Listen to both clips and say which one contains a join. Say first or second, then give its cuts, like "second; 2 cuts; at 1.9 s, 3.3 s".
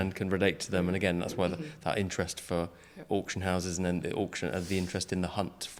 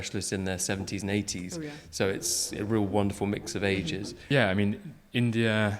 second; 1 cut; at 4.2 s